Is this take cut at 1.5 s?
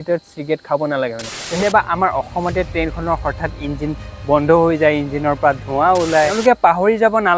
yes; 2 cuts; at 1.5 s, 6.4 s

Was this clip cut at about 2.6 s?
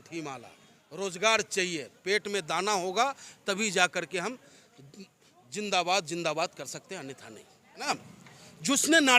no; 1 cut; at 7.9 s

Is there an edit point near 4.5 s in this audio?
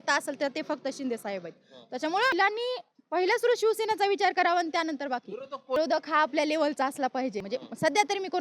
no; 3 cuts; at 2.3 s, 5.8 s, 7.5 s

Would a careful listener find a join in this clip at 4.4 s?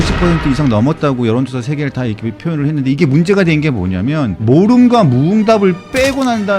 yes; 1 cut; at 4.4 s

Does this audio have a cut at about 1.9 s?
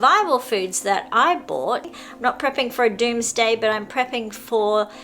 yes; 1 cut; at 1.9 s

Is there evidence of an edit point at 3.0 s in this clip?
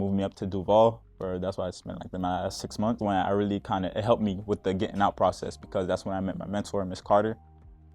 yes; 1 cut; at 3.0 s

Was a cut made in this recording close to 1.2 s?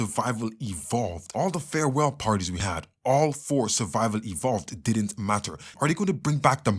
yes; 2 cuts; at 1.2 s, 5.7 s

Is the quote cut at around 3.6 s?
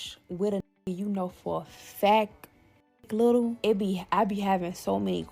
yes; 1 cut; at 3.6 s

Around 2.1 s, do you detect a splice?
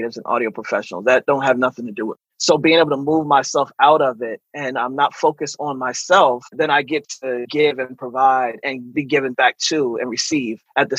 no; 1 cut; at 9.2 s

